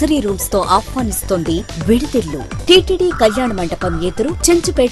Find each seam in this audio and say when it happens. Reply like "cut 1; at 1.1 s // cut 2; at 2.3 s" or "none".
cut 1; at 2.5 s